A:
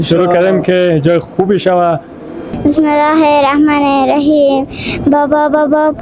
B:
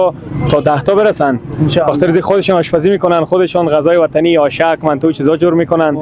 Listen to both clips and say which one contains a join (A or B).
A